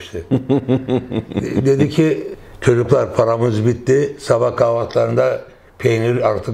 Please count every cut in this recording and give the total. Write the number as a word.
one